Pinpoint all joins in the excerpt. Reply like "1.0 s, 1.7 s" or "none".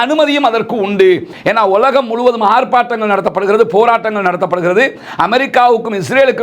1.3 s